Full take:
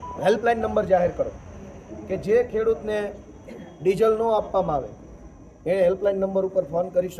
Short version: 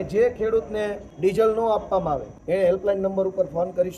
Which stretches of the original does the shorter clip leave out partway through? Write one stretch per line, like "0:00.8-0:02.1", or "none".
0:03.2-0:03.7
0:05.0-0:05.5